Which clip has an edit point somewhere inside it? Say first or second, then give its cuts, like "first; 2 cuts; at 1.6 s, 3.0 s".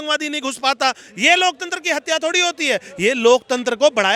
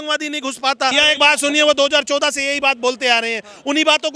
second; 1 cut; at 0.9 s